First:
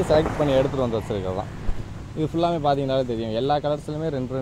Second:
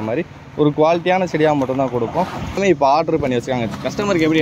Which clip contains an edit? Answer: second; 1 cut; at 2.6 s

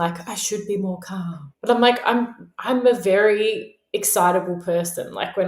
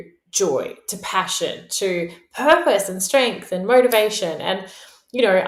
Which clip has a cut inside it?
first; 1 cut; at 1.5 s

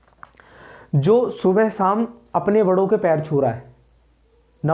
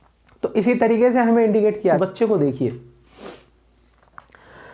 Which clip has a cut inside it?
second; 1 cut; at 2.0 s

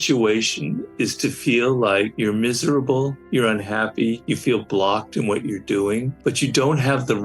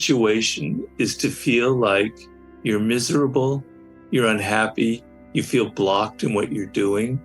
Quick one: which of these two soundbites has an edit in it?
first; 4 cuts; at 2.1 s, 3.2 s, 4.2 s, 6.1 s

